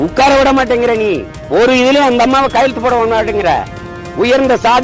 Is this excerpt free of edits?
no; 1 cut; at 1.3 s

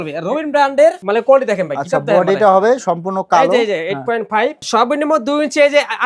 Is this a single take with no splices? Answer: no; 2 cuts; at 1.0 s, 4.6 s

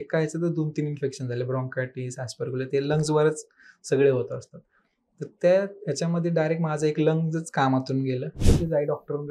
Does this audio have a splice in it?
yes; 1 cut; at 8.4 s

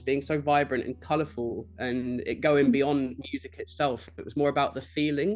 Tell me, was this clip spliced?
no; 0 cuts

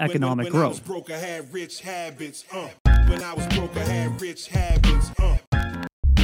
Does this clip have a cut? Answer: yes; 1 cut; at 0.9 s

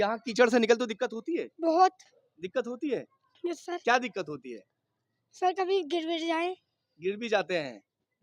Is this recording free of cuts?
yes; 0 cuts

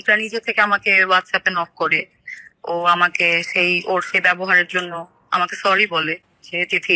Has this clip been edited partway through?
no; 0 cuts

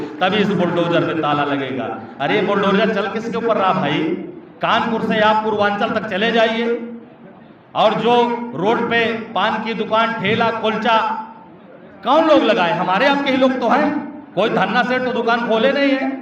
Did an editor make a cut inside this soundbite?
no; 0 cuts

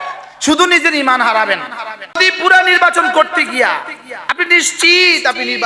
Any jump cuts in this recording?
yes; 1 cut; at 2.2 s

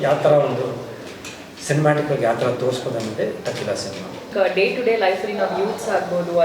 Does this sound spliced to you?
yes; 1 cut; at 4.3 s

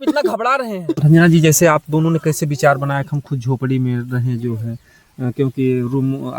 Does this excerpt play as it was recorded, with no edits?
no; 1 cut; at 0.9 s

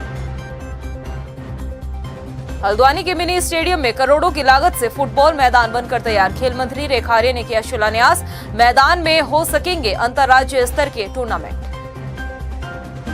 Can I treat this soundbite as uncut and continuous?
no; 1 cut; at 1.0 s

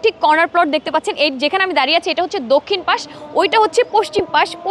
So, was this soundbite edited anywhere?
no; 0 cuts

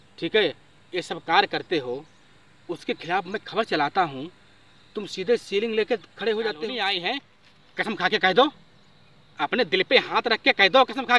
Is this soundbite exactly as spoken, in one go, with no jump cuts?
no; 1 cut; at 6.9 s

